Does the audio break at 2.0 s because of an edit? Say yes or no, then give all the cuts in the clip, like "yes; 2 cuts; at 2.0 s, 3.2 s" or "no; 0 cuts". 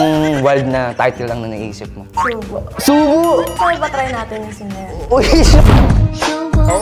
no; 0 cuts